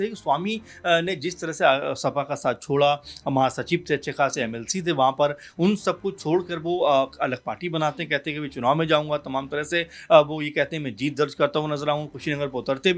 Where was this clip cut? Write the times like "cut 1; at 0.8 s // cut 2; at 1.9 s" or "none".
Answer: none

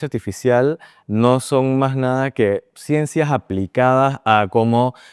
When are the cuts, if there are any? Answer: none

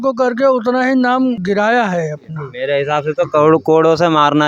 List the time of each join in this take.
cut 1; at 1.4 s // cut 2; at 2.5 s

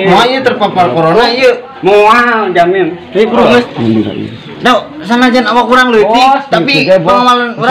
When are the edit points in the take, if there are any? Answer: cut 1; at 1.8 s // cut 2; at 3.7 s

